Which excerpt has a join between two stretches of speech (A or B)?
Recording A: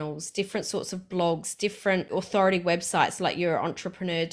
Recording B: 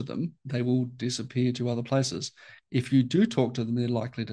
A